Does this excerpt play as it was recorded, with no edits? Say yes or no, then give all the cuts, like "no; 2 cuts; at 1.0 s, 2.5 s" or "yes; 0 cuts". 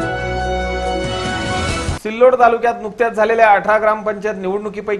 yes; 0 cuts